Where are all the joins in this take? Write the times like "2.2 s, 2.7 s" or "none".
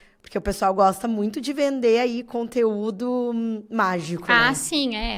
none